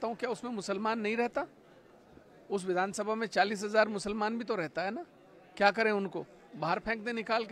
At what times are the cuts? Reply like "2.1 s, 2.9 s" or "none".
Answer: none